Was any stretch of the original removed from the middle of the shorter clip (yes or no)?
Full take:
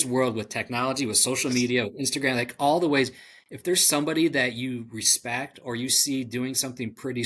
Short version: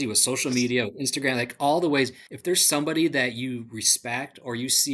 yes